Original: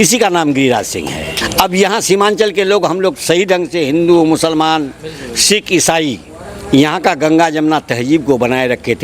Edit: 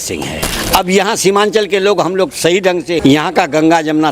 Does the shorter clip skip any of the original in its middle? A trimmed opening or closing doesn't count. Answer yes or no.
yes